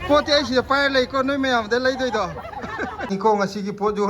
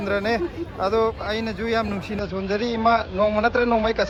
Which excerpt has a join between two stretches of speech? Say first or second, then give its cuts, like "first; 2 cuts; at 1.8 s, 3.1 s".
first; 1 cut; at 3.1 s